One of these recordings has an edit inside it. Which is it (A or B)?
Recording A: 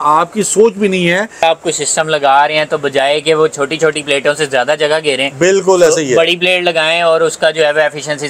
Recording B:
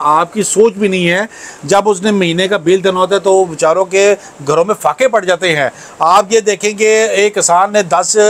A